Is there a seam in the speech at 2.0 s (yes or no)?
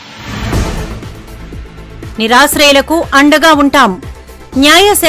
yes